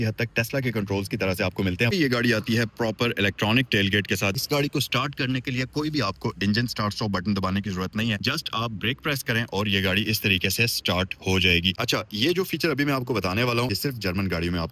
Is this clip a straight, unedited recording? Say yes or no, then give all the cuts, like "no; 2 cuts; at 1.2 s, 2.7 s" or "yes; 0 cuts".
no; 5 cuts; at 1.9 s, 4.4 s, 8.2 s, 11.8 s, 13.7 s